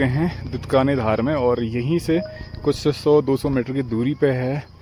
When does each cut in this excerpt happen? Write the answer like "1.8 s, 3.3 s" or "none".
none